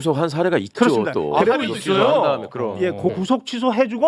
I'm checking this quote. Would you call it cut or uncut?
cut